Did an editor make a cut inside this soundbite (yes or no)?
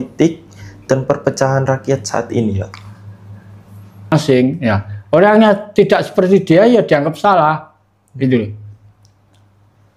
yes